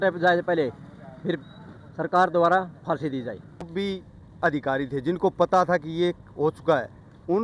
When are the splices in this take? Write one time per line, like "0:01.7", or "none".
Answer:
0:03.7